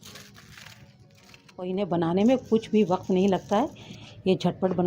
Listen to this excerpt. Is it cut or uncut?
cut